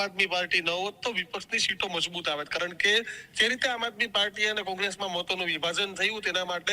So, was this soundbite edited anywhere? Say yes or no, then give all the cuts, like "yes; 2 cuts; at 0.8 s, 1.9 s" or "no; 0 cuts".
no; 0 cuts